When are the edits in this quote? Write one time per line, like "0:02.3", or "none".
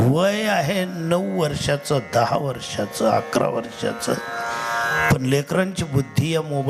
none